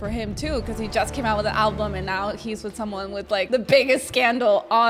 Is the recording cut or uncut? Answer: uncut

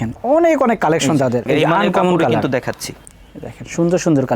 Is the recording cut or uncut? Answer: cut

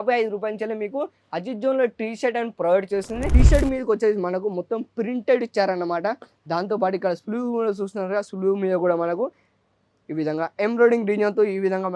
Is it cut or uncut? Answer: cut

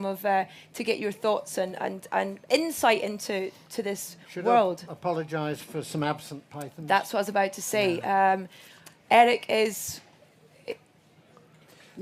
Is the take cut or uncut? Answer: cut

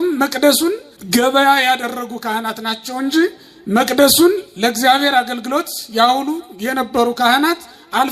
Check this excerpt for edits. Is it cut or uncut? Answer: cut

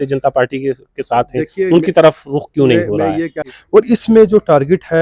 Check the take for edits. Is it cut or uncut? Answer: cut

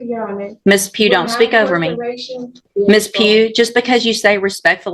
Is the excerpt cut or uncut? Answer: cut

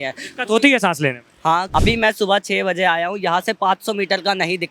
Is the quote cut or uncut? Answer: cut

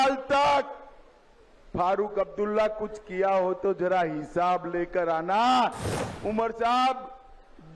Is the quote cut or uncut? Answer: cut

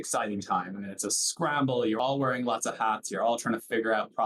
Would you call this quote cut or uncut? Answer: cut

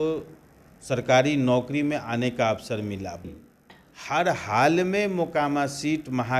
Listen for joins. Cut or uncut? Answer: cut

